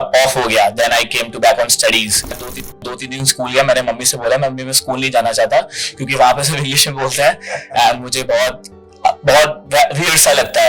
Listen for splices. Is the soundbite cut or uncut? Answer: cut